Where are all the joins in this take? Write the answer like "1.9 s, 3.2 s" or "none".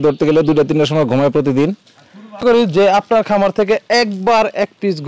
2.4 s

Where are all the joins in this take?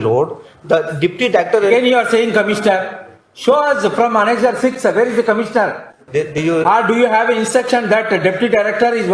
5.9 s

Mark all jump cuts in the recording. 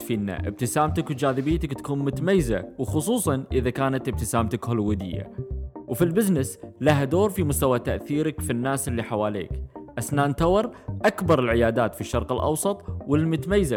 none

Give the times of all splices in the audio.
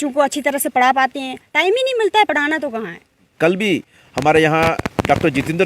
3.3 s

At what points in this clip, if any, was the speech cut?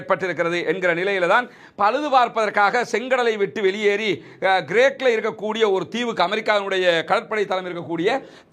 none

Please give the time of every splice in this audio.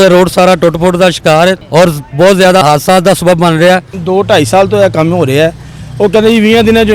2.6 s, 3.9 s

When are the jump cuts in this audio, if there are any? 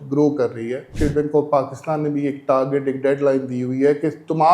0.9 s

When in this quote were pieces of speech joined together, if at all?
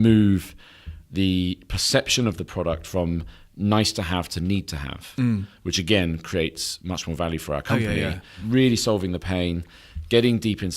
8.4 s

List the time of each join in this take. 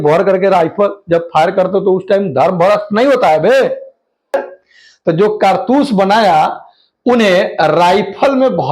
4.3 s

